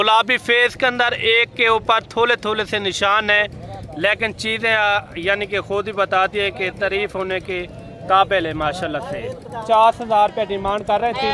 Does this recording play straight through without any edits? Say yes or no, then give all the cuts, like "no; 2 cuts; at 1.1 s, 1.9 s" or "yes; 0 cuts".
no; 1 cut; at 9.6 s